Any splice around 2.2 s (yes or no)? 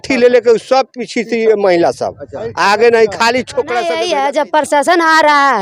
no